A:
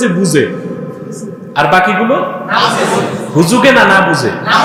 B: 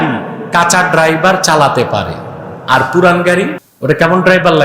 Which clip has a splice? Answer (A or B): B